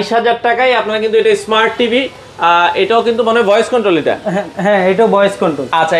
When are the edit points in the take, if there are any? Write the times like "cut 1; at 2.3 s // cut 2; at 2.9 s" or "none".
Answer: none